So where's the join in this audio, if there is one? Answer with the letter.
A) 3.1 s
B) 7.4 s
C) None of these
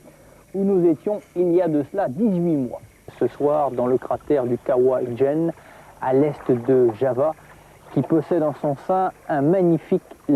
A